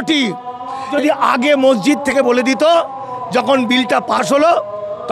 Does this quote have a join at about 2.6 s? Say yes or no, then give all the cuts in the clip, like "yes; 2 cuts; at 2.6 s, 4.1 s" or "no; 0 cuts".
no; 1 cut; at 0.9 s